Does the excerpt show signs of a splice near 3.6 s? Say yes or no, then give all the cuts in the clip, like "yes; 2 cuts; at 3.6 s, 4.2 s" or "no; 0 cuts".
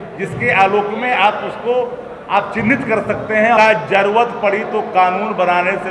yes; 1 cut; at 3.6 s